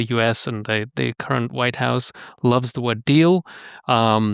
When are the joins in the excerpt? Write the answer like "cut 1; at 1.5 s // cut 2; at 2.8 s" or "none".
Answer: none